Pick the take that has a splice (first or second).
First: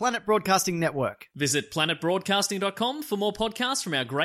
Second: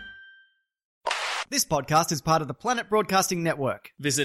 second